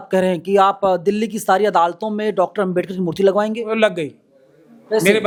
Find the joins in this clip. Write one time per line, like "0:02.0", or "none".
none